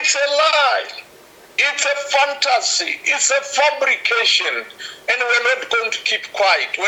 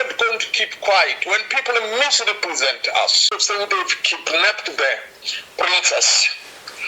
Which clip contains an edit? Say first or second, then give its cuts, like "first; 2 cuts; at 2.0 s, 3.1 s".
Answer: second; 1 cut; at 3.4 s